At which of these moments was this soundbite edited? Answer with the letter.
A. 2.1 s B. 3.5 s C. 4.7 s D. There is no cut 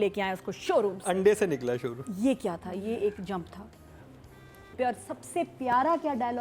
C